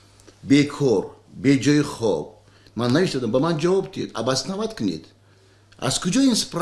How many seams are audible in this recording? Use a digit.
1